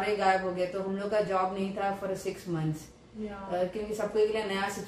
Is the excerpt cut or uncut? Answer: uncut